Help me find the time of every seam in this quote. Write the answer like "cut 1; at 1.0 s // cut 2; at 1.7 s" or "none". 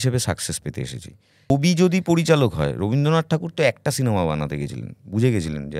cut 1; at 1.5 s